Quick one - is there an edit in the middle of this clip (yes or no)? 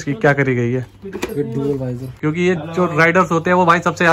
yes